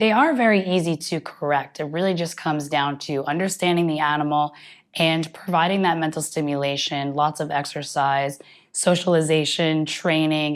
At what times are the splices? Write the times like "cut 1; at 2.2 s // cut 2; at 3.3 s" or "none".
none